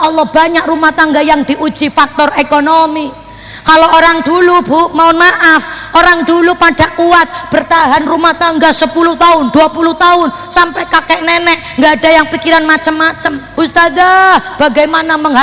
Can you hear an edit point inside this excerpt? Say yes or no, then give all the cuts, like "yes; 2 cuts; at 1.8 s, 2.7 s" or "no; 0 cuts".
yes; 1 cut; at 13.4 s